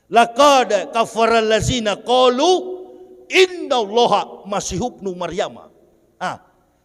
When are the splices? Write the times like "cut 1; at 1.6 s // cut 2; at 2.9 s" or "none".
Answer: none